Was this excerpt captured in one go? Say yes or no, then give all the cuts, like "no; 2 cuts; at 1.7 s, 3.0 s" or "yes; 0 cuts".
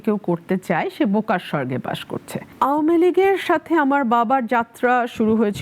no; 1 cut; at 2.5 s